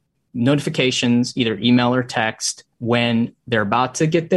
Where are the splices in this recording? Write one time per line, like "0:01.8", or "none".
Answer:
0:02.7